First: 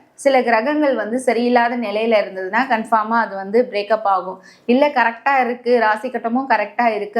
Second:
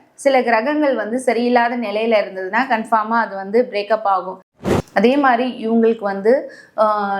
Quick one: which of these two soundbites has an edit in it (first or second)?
second